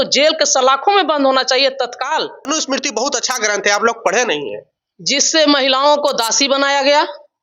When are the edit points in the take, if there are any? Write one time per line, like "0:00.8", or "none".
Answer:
0:02.5